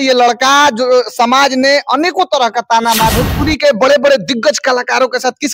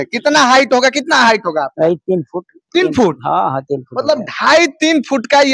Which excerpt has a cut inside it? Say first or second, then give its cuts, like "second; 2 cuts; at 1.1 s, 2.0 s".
first; 1 cut; at 3.1 s